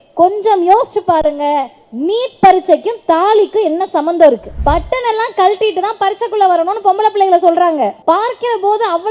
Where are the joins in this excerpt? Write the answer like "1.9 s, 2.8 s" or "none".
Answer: 4.5 s, 8.0 s